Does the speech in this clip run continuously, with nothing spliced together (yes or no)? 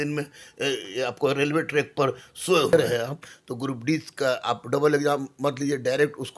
no